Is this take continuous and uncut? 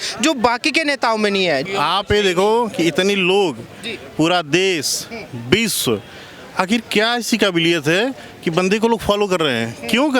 no; 1 cut; at 1.7 s

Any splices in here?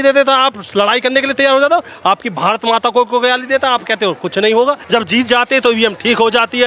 yes; 1 cut; at 4.8 s

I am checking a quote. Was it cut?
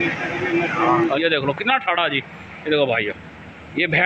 yes; 1 cut; at 1.2 s

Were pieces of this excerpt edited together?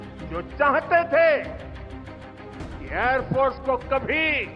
no; 0 cuts

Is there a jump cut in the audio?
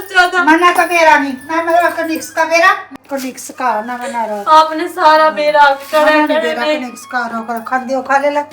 yes; 1 cut; at 2.9 s

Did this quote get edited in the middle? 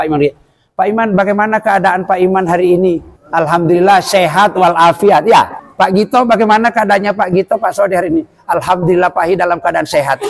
yes; 2 cuts; at 3.1 s, 5.6 s

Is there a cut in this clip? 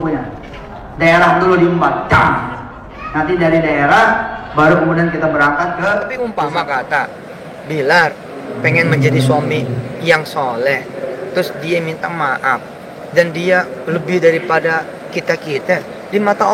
yes; 1 cut; at 6.1 s

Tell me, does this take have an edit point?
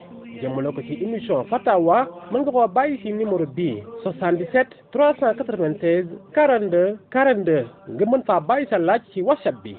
no; 0 cuts

